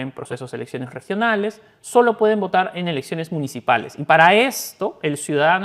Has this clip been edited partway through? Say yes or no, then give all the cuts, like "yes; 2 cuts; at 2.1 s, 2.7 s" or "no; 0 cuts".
no; 0 cuts